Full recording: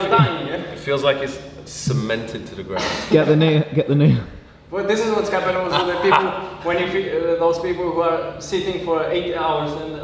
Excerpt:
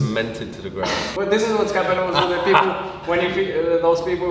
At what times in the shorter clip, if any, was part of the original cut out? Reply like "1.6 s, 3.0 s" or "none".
1.0 s